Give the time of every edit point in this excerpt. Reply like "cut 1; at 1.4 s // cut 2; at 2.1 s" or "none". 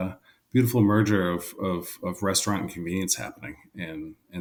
none

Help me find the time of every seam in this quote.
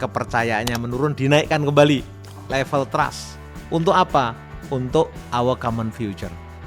none

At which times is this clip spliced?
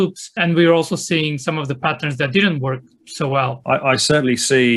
cut 1; at 3.6 s

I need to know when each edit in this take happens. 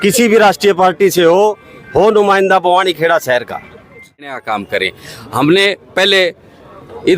cut 1; at 4.4 s

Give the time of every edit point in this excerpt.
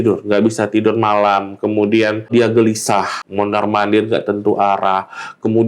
cut 1; at 2.3 s // cut 2; at 3.2 s

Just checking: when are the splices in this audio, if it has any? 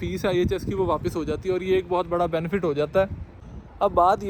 none

